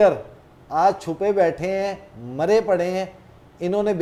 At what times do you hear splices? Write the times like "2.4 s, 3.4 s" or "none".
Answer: none